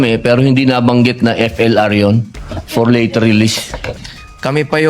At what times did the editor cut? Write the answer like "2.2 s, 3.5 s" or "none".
3.9 s